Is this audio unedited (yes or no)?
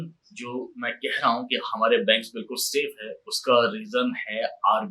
yes